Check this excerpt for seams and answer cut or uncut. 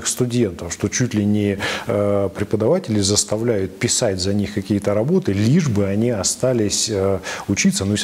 uncut